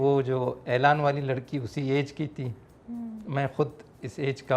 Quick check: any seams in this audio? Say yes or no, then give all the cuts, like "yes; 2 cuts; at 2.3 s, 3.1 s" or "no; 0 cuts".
no; 0 cuts